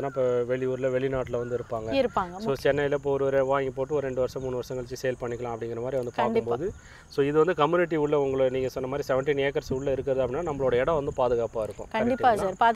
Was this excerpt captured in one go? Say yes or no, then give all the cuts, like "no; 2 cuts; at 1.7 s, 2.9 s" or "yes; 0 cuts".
yes; 0 cuts